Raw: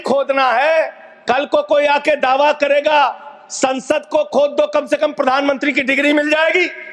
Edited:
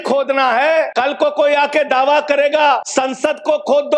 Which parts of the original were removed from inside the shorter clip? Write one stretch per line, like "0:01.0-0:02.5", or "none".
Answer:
0:00.9-0:01.2
0:03.2-0:03.5